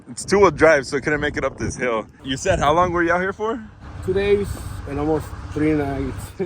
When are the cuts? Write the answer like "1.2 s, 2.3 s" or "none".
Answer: 2.2 s